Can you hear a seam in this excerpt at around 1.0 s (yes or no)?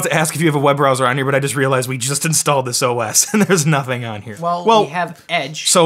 no